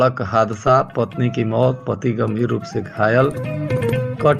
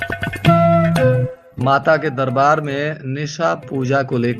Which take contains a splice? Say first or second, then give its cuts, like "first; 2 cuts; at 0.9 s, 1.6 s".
second; 1 cut; at 1.3 s